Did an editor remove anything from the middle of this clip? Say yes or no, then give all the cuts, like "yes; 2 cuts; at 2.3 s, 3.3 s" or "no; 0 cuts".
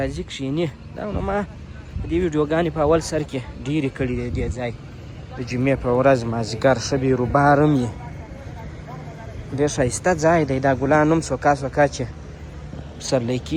no; 0 cuts